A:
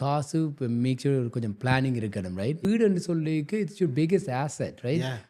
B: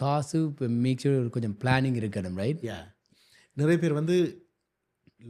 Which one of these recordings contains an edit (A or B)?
A